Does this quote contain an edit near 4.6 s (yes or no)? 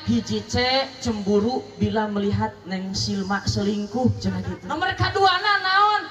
yes